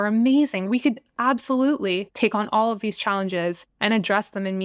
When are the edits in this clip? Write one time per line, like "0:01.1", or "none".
0:00.9
0:02.1
0:03.7